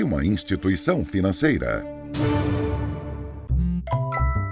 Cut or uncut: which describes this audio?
cut